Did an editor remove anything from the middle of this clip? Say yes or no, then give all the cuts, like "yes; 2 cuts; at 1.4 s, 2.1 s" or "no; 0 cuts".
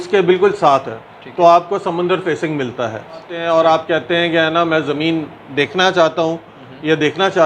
yes; 1 cut; at 3.3 s